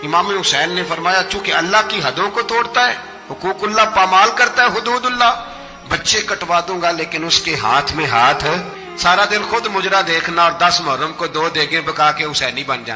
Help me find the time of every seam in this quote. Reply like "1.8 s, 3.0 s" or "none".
none